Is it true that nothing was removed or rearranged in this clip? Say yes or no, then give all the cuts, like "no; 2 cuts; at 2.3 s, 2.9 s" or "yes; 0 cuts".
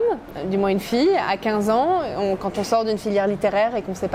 yes; 0 cuts